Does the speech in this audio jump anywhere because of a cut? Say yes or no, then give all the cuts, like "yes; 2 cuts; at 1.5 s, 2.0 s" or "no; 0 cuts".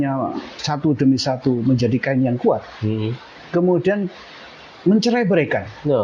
no; 0 cuts